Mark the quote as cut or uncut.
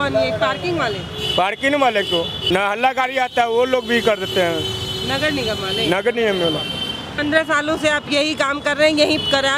cut